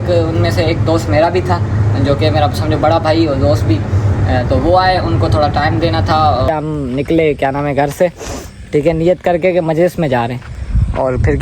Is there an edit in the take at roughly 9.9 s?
no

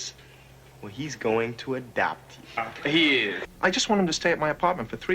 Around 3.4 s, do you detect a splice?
yes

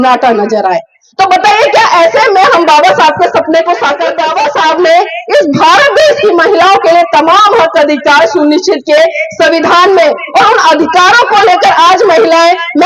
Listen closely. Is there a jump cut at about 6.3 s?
no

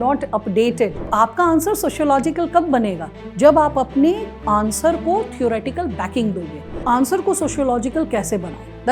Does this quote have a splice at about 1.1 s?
yes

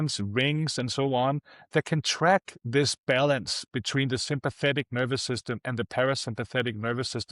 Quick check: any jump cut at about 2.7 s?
no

